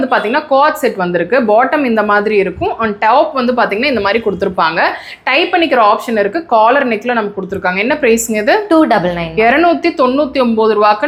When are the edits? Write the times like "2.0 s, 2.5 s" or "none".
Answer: none